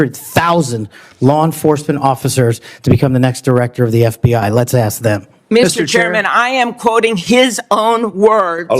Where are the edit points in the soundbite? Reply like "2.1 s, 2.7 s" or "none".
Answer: none